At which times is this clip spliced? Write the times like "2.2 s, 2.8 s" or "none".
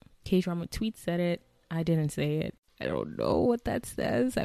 2.7 s